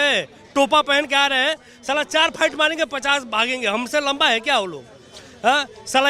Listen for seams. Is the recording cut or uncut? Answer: uncut